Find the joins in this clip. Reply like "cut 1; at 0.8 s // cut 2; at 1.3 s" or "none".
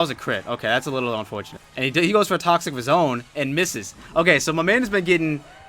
cut 1; at 1.6 s